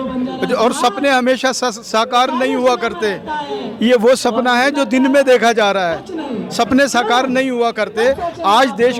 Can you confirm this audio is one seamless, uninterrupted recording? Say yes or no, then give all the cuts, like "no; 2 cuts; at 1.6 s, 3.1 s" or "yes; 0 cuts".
yes; 0 cuts